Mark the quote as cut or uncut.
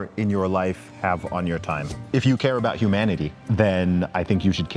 cut